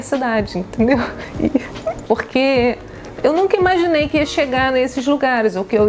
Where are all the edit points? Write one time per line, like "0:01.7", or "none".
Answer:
0:02.0

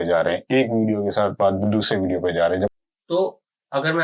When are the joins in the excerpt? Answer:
0:02.8

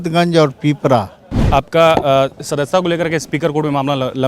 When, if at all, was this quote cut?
0:01.4

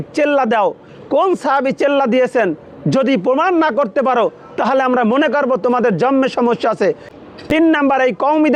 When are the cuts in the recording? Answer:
0:07.1

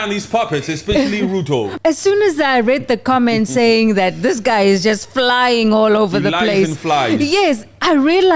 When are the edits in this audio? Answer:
0:01.7

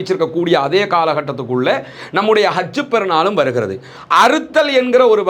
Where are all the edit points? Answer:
0:04.0

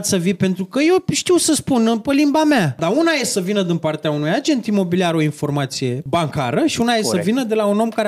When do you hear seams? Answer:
0:02.8
0:06.0

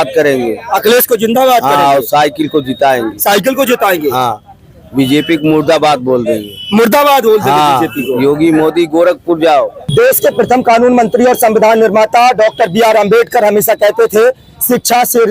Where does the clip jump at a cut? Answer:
0:09.8

